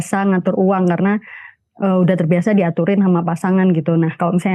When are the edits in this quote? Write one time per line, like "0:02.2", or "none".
none